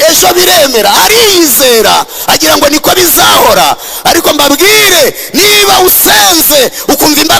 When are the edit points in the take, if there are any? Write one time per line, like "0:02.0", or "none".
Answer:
none